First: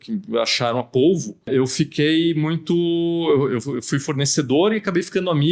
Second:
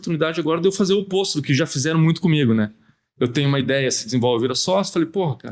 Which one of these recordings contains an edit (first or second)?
first